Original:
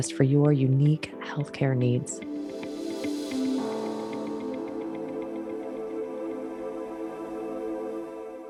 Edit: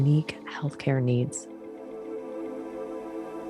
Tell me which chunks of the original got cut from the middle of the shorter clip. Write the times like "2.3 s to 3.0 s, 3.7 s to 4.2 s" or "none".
2.1 s to 5.2 s